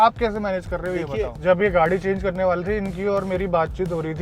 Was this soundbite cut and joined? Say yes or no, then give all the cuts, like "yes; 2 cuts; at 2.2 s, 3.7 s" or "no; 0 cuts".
yes; 1 cut; at 1.3 s